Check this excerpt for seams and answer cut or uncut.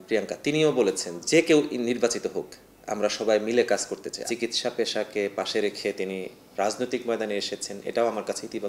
cut